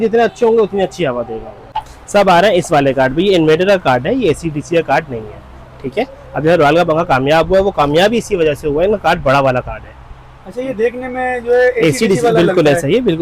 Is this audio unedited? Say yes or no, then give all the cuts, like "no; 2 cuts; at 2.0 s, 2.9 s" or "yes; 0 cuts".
yes; 0 cuts